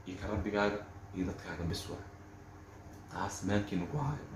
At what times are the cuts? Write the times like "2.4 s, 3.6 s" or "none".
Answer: none